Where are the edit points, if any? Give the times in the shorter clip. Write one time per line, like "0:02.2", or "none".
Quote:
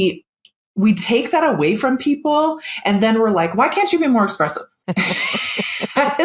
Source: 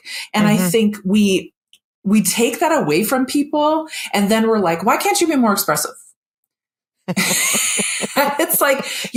0:04.7

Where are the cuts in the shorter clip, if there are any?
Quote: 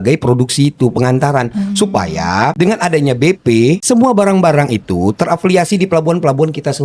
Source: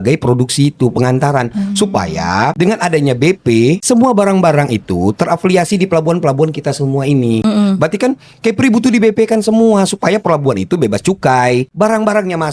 none

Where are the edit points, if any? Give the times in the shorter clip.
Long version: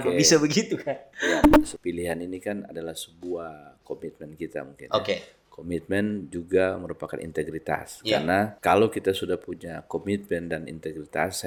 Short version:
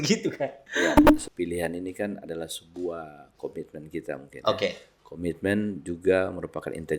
none

